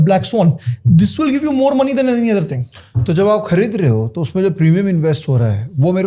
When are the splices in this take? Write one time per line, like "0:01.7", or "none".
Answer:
none